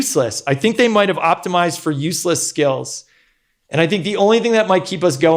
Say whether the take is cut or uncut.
uncut